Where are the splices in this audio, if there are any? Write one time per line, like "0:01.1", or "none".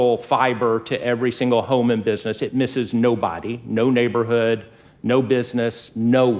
none